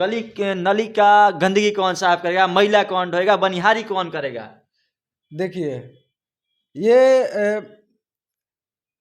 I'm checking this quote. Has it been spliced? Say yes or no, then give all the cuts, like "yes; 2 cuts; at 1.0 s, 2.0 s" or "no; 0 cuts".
no; 0 cuts